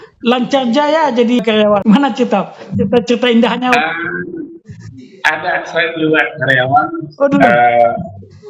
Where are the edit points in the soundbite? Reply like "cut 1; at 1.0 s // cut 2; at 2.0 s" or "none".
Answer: cut 1; at 1.5 s